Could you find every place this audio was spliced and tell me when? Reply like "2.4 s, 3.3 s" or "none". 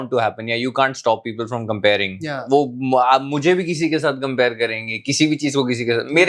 none